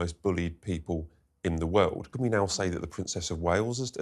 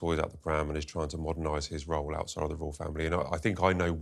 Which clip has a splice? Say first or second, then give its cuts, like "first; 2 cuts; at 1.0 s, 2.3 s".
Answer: first; 1 cut; at 2.1 s